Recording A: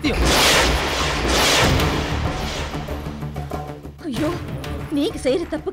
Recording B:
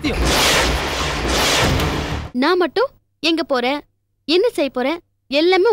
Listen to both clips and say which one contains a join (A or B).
B